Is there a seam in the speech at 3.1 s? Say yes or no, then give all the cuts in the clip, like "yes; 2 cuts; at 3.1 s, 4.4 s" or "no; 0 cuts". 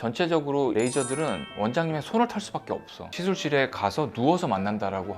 yes; 1 cut; at 3.1 s